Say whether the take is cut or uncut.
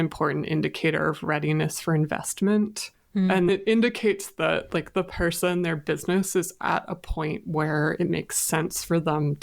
cut